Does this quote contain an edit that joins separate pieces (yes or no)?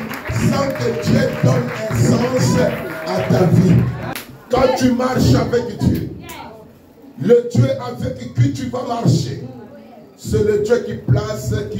yes